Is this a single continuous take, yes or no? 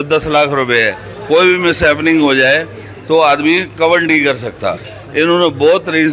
no